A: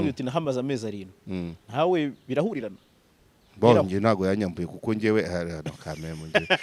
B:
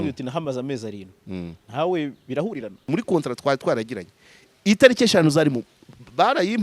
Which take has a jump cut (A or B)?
B